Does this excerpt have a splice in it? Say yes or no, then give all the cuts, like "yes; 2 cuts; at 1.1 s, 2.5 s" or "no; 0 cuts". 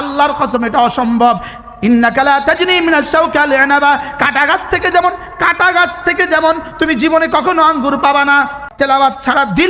yes; 1 cut; at 8.7 s